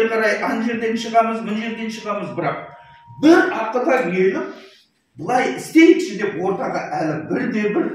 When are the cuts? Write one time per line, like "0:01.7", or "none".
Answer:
none